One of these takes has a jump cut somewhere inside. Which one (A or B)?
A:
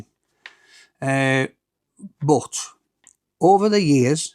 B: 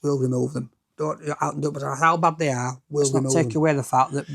B